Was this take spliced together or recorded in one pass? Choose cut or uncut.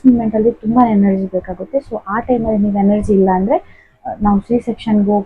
uncut